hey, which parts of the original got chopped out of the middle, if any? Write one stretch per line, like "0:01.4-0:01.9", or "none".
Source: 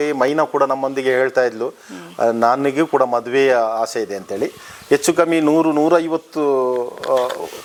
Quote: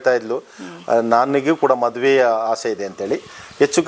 none